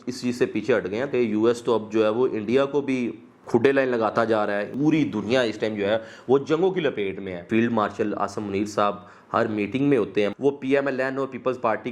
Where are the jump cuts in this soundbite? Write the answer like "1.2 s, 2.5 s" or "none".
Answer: 1.1 s, 4.7 s, 7.5 s, 10.3 s